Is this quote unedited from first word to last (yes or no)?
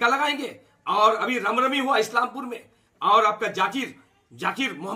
yes